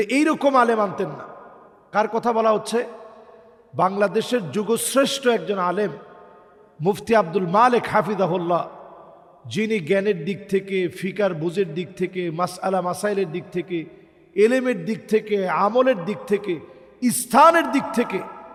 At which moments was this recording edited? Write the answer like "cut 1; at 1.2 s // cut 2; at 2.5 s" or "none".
none